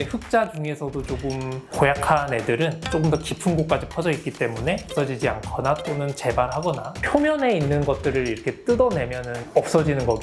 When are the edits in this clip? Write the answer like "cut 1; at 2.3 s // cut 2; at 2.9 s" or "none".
cut 1; at 4.9 s // cut 2; at 7.0 s